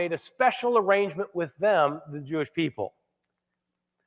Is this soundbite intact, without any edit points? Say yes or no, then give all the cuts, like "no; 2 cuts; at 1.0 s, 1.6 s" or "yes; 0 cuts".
yes; 0 cuts